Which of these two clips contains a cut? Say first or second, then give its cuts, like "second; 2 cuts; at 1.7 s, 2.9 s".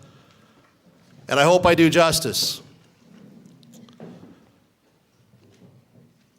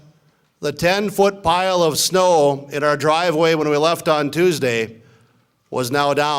first; 1 cut; at 4.0 s